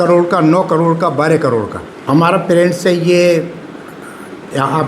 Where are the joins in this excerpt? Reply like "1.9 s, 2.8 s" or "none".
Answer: 2.0 s

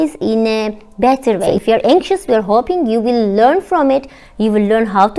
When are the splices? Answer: 1.5 s

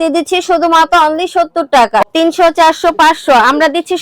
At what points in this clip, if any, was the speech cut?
2.0 s

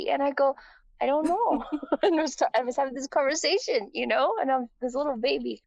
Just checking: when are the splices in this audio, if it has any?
none

